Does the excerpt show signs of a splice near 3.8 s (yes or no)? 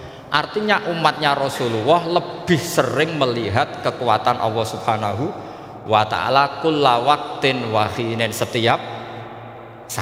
no